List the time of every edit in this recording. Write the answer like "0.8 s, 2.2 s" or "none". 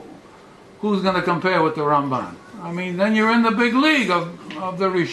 1.6 s